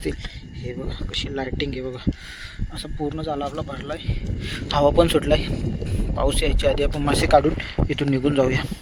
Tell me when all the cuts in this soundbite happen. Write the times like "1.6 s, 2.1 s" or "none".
none